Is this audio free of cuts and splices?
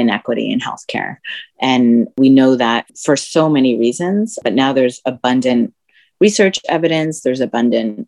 yes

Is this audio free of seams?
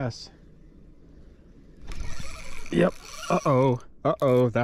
yes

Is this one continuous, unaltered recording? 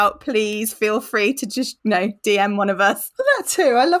no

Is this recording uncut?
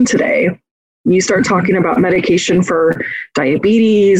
yes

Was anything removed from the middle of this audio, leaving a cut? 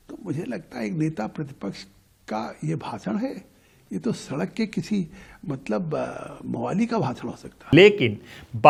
no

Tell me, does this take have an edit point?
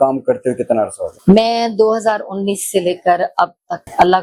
no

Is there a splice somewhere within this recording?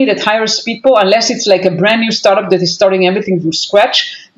no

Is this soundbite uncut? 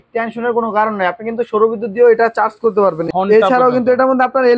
no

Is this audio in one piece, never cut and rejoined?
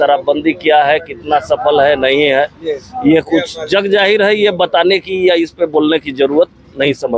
yes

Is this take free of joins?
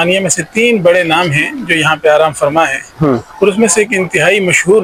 yes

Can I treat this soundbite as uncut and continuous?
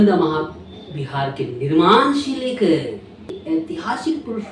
yes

